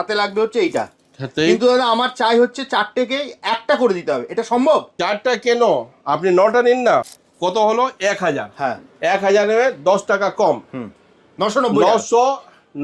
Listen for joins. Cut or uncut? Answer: cut